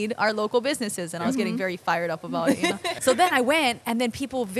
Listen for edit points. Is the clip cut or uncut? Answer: cut